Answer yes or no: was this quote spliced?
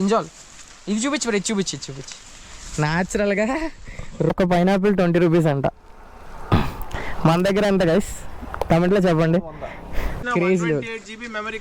yes